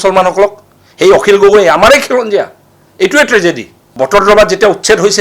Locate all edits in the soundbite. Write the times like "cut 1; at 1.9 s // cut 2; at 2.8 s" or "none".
cut 1; at 3.8 s